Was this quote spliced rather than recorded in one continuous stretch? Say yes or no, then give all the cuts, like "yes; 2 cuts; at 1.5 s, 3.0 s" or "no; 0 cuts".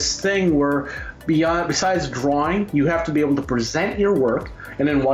no; 0 cuts